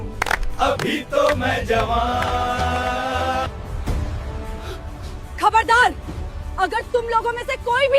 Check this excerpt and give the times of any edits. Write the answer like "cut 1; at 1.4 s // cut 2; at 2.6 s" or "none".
cut 1; at 3.5 s